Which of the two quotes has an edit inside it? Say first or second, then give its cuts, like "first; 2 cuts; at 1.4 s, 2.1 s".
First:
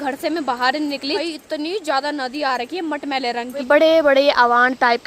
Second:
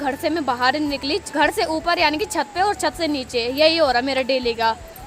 first; 2 cuts; at 1.2 s, 3.6 s